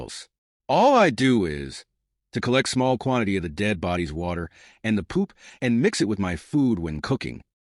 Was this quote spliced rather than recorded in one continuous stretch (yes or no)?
no